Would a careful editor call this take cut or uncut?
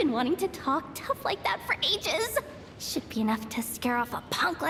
uncut